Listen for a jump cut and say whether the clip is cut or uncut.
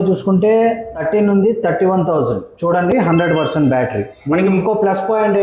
cut